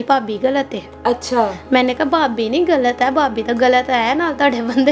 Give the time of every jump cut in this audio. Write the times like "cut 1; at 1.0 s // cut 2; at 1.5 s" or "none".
none